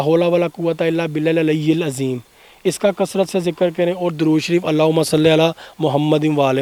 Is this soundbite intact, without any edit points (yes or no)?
yes